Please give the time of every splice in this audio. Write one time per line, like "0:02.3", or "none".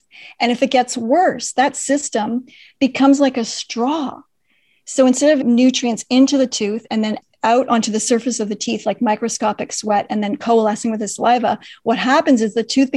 0:05.4
0:07.2

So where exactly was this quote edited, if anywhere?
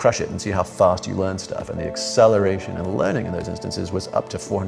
none

